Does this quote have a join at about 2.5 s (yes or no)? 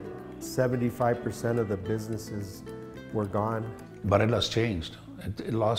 no